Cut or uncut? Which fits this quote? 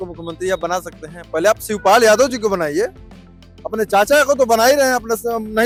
uncut